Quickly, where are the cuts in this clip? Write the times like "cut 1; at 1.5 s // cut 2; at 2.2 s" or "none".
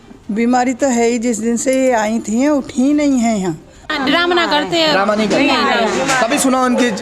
cut 1; at 3.9 s